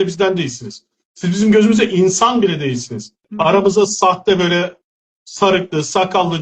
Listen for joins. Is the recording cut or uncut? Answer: cut